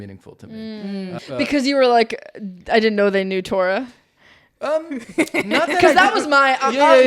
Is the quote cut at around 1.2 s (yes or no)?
yes